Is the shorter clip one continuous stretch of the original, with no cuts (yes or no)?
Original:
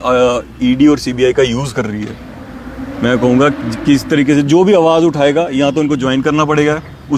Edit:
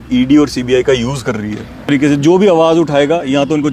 no